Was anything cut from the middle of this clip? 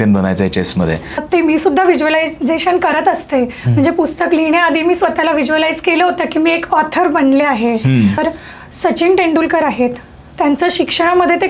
yes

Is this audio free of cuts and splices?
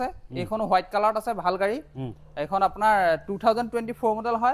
yes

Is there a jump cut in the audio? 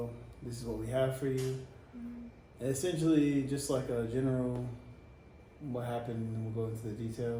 no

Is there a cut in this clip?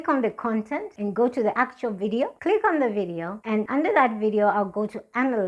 yes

